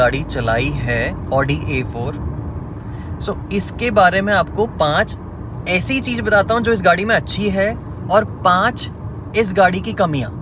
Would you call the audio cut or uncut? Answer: uncut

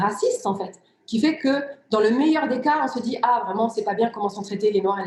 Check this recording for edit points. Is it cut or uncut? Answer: uncut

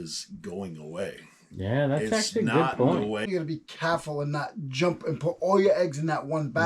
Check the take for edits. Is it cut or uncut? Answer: cut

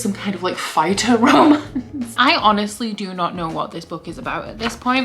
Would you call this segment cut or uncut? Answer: cut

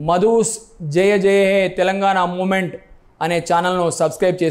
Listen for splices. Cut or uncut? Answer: uncut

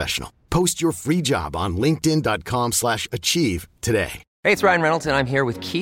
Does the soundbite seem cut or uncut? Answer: cut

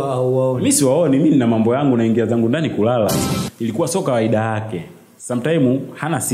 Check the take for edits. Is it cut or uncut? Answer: cut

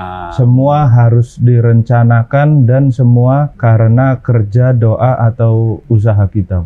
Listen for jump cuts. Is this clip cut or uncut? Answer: cut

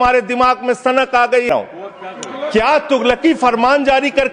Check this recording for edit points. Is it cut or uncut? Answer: cut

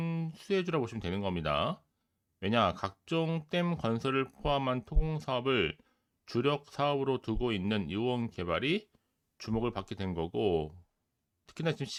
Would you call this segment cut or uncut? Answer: uncut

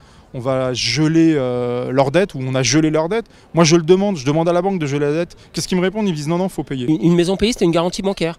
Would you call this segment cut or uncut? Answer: cut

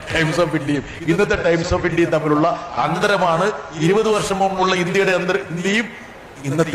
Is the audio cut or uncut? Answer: uncut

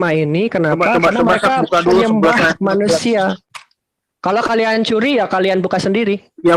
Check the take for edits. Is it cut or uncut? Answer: cut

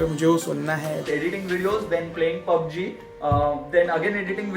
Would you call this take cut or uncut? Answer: cut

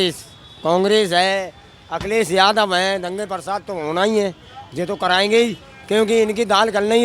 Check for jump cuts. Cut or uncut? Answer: uncut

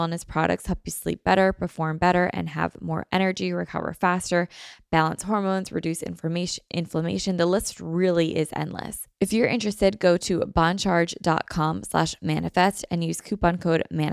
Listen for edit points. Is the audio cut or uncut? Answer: cut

